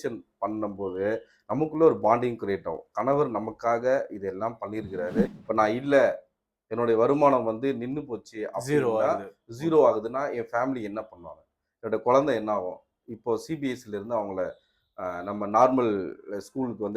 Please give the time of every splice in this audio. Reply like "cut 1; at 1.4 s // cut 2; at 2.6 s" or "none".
cut 1; at 5.4 s